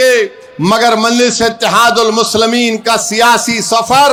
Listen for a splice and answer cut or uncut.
uncut